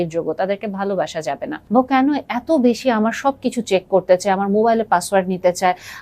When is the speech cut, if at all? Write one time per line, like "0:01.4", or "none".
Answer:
0:01.5

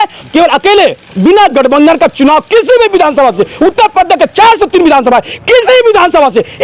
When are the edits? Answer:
none

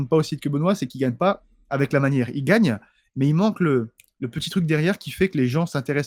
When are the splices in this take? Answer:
none

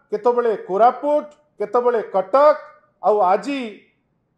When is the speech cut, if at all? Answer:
none

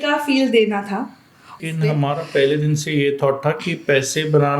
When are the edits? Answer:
0:01.6

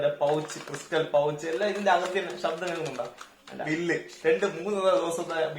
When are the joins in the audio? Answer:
0:03.6

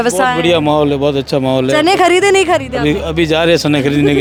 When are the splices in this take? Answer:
none

